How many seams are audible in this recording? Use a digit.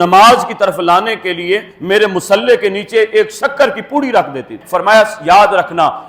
1